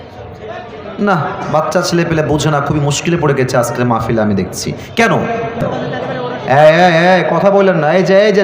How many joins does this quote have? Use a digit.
1